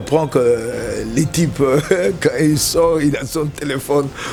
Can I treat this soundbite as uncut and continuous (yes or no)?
yes